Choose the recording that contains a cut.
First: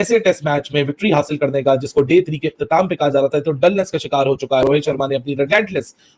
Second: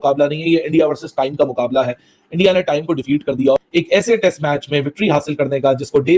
first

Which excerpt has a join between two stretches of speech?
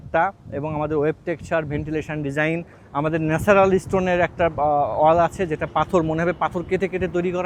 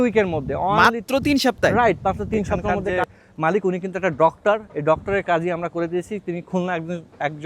second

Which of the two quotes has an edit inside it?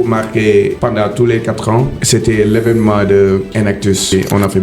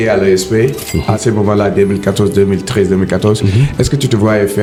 first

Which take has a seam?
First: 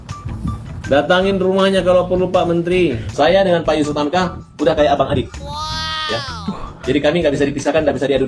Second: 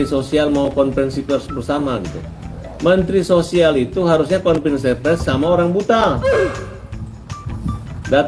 first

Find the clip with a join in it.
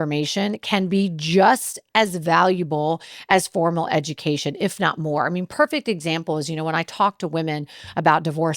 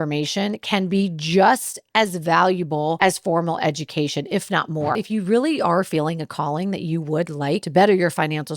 second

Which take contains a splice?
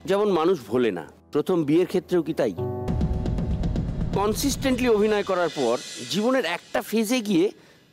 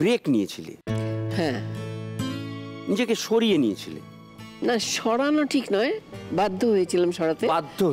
first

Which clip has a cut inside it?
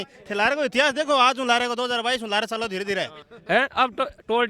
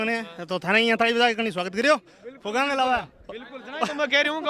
first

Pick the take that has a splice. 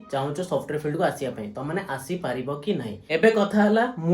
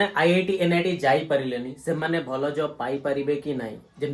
first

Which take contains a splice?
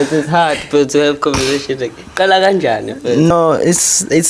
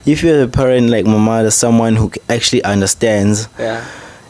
first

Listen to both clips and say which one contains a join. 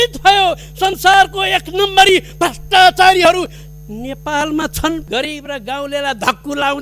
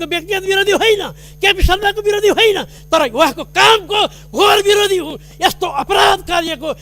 first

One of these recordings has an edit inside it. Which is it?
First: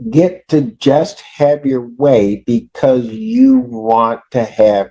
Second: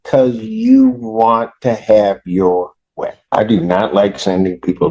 second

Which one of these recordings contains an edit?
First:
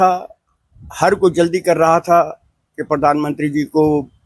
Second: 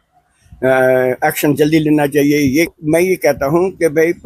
second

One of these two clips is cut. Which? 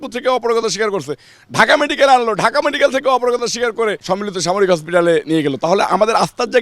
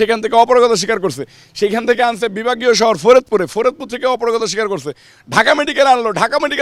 first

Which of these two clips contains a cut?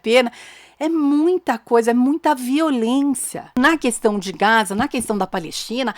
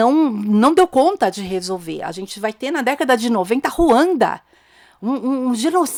first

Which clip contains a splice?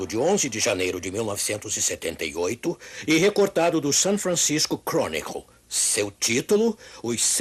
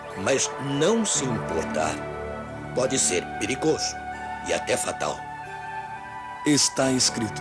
first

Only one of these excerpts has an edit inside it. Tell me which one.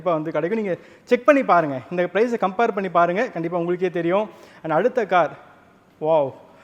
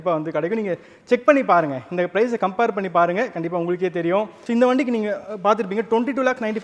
second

